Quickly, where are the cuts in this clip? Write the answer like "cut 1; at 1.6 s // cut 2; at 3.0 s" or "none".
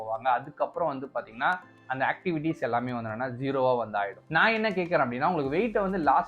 cut 1; at 4.2 s

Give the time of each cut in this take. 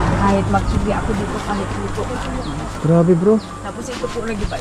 cut 1; at 2.7 s

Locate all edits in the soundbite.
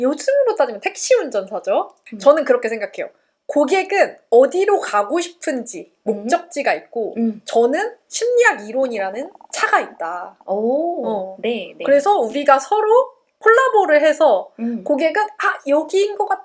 none

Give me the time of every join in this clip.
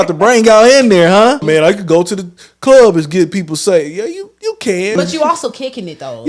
cut 1; at 1.5 s // cut 2; at 4.9 s

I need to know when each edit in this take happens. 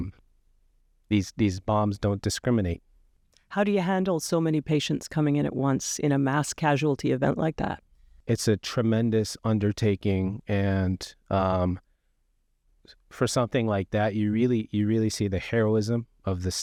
none

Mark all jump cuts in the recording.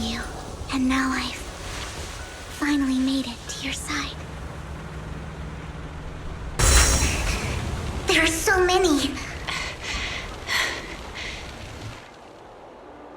cut 1; at 6.6 s

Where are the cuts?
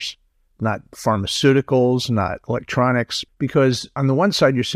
cut 1; at 3.5 s

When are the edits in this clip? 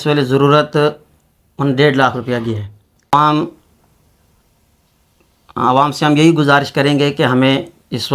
cut 1; at 3.1 s

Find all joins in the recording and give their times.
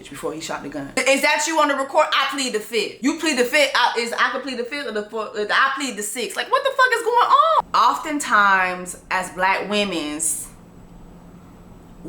cut 1; at 1.0 s // cut 2; at 2.9 s // cut 3; at 7.6 s

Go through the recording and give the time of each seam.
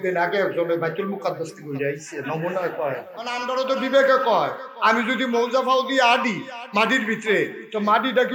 cut 1; at 3.4 s

